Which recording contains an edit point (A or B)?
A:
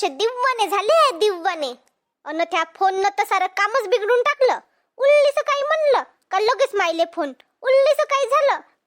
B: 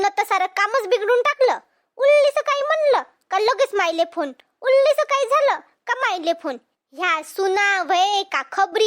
A